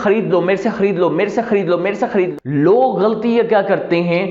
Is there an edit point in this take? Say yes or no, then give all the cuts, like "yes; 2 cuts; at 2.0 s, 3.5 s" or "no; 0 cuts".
yes; 1 cut; at 2.3 s